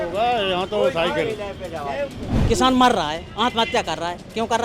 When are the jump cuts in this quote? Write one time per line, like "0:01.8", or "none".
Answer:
0:02.3